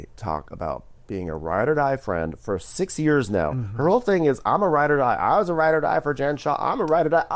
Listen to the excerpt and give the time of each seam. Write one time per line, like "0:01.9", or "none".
none

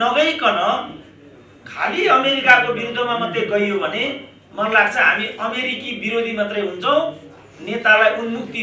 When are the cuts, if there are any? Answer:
none

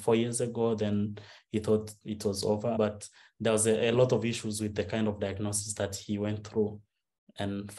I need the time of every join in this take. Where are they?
0:02.7

